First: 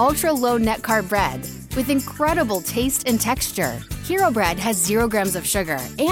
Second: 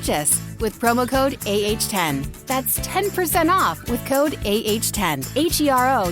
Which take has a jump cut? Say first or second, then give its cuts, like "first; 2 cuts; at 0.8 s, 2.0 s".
second; 1 cut; at 5.2 s